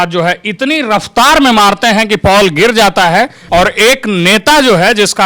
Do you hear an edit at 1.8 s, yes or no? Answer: no